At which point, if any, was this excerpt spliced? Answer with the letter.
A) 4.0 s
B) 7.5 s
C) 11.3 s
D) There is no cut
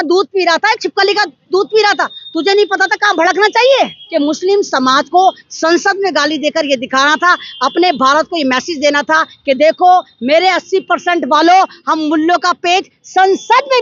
A